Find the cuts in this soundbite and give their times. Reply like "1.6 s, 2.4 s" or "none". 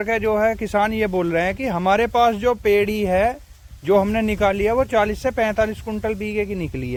none

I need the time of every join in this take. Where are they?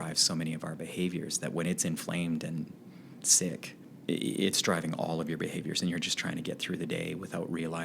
3.8 s

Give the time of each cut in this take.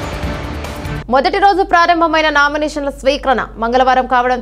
1.0 s

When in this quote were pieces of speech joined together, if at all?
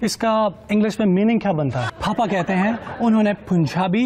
1.9 s

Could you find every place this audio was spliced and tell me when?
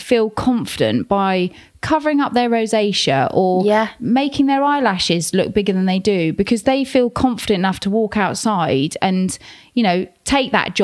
none

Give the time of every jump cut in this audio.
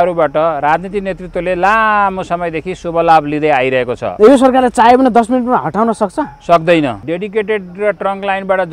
4.0 s, 7.0 s

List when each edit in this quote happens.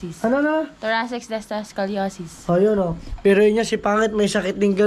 none

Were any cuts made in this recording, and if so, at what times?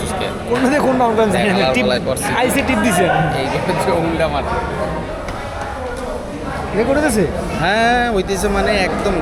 none

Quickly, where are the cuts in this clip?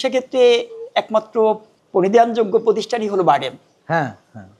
1.7 s

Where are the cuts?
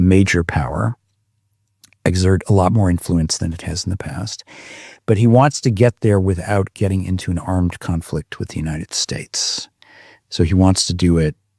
none

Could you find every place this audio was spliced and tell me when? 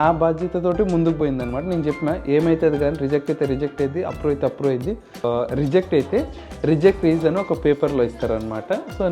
5.2 s

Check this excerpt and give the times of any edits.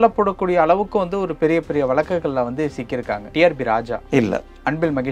3.3 s, 4.0 s

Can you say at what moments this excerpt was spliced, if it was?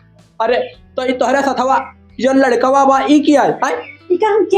none

